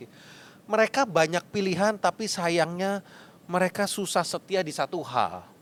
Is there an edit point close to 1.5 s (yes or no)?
no